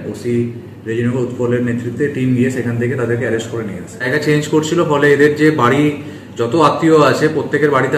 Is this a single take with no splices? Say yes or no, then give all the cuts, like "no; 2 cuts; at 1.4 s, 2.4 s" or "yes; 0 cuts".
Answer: no; 1 cut; at 4.1 s